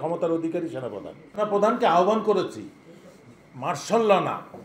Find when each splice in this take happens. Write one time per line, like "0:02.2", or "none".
0:01.2

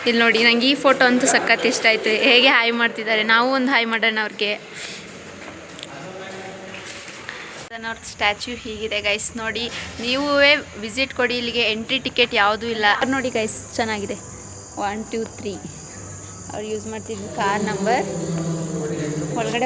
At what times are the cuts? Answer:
0:00.9
0:07.7
0:13.0

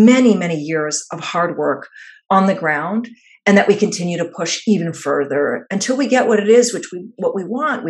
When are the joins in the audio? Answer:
none

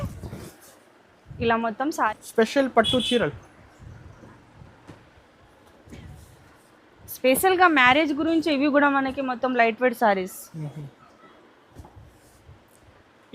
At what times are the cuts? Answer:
0:02.1

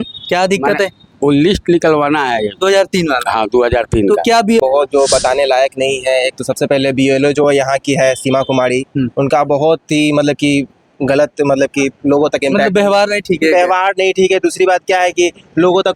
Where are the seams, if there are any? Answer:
0:04.6

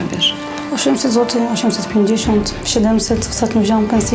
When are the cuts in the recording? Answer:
none

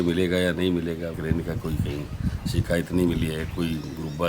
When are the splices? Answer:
0:01.2

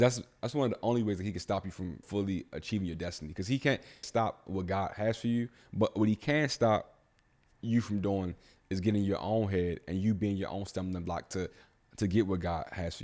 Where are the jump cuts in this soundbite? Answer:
0:02.0
0:04.0

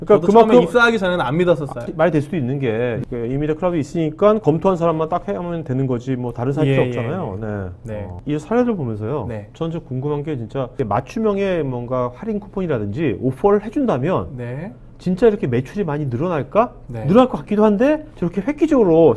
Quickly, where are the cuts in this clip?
0:01.9
0:03.0
0:04.4
0:08.1
0:10.7

